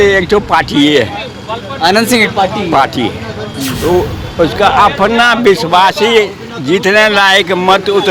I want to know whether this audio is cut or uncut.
uncut